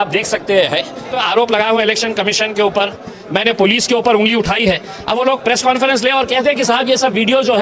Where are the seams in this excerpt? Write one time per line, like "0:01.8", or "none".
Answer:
0:01.2